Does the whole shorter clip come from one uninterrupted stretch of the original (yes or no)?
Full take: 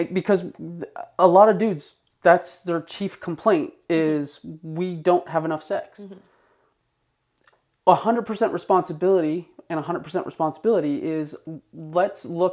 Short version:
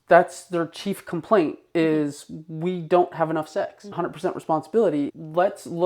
no